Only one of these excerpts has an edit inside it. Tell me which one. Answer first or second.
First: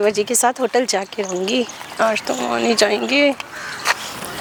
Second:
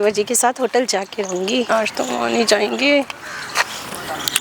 second